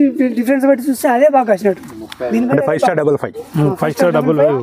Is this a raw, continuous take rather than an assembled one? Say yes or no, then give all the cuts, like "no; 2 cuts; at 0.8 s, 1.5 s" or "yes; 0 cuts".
yes; 0 cuts